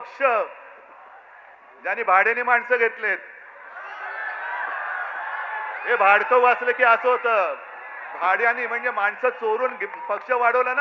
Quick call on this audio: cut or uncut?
uncut